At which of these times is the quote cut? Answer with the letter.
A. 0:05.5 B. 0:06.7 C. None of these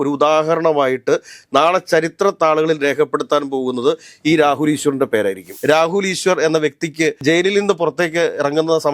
A